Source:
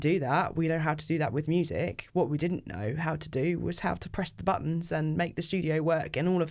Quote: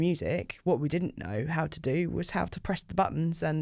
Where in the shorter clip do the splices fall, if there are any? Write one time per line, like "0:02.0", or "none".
none